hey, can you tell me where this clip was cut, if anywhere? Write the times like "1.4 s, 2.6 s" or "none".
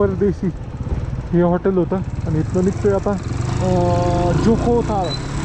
none